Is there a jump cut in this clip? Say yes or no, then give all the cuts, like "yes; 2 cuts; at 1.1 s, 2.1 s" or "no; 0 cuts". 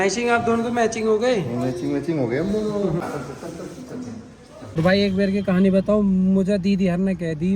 yes; 2 cuts; at 3.2 s, 4.7 s